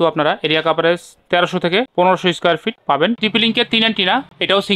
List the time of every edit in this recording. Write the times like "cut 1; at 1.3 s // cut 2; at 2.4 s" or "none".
cut 1; at 3.2 s

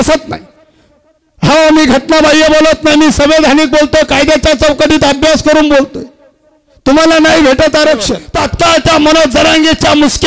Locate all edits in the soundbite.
cut 1; at 8.2 s

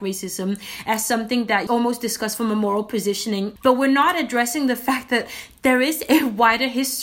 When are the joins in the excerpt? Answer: cut 1; at 1.6 s // cut 2; at 3.5 s

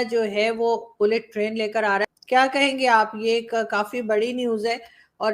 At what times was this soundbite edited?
cut 1; at 2.0 s

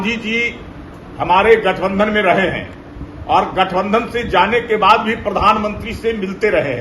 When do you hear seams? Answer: none

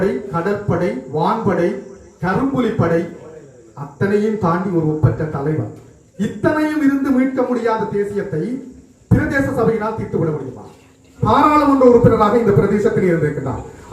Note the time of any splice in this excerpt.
cut 1; at 11.1 s

